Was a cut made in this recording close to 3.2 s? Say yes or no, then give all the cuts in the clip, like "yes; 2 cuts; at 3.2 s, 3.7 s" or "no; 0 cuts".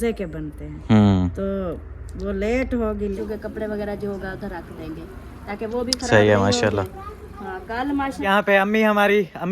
yes; 2 cuts; at 3.2 s, 8.3 s